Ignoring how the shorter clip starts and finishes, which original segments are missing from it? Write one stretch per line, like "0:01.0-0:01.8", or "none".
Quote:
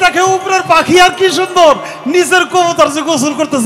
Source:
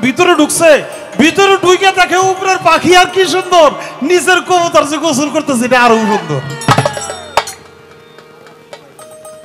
none

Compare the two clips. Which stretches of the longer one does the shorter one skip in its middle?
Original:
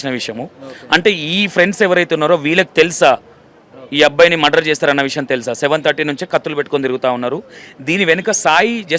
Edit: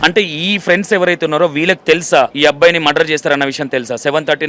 0:03.2-0:03.9

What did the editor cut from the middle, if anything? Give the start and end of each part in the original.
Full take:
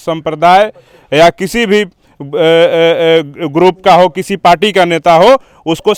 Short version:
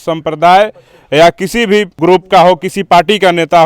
0:01.9-0:03.5

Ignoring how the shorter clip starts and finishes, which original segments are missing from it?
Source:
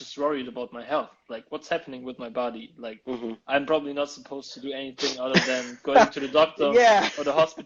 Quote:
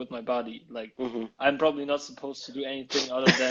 none

